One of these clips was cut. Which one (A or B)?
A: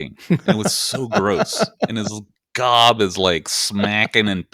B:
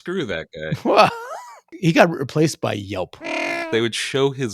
B